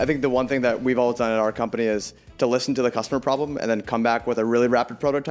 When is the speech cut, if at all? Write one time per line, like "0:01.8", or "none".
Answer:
none